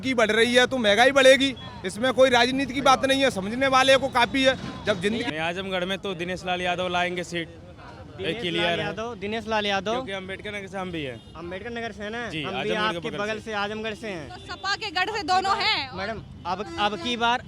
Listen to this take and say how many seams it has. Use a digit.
1